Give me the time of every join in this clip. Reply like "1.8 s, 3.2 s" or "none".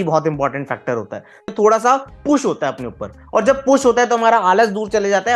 1.5 s